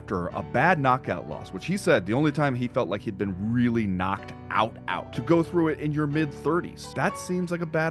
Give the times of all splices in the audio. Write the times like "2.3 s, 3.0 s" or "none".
5.1 s, 6.9 s